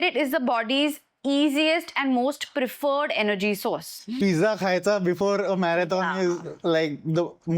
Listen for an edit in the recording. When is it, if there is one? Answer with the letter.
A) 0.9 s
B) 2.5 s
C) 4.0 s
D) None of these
C